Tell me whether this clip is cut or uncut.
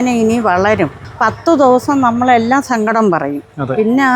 cut